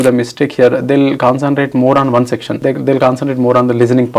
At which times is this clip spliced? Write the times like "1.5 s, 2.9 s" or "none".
2.5 s